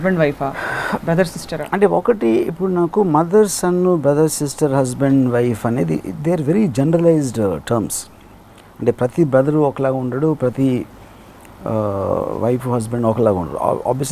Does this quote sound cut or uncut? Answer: uncut